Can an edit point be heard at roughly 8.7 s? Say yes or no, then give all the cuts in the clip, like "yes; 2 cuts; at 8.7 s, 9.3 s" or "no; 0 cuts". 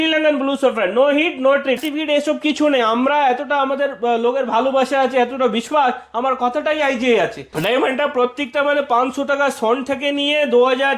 no; 2 cuts; at 1.8 s, 7.4 s